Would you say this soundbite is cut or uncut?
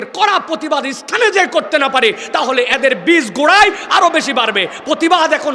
uncut